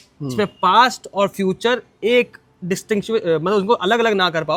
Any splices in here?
no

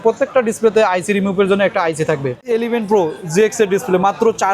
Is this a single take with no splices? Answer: no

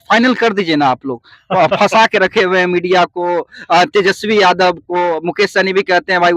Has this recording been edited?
no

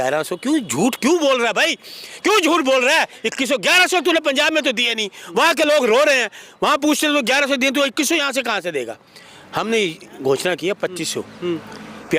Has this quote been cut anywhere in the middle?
no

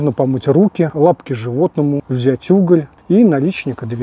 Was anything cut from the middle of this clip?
yes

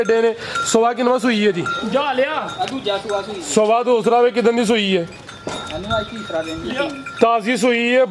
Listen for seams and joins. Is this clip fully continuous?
yes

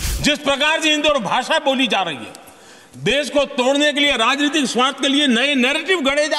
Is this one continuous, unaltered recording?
yes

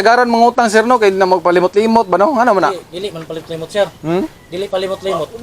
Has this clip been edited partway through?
no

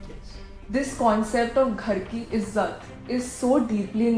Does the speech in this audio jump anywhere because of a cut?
no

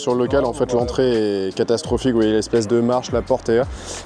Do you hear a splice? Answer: no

